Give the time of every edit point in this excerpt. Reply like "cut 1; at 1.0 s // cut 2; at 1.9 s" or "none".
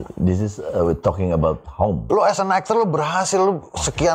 cut 1; at 2.0 s